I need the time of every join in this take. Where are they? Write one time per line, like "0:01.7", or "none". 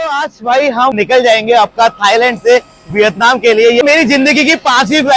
0:00.9
0:03.8